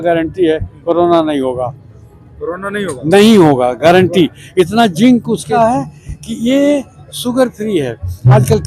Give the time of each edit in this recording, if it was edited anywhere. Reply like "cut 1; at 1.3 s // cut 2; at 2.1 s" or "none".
cut 1; at 5.5 s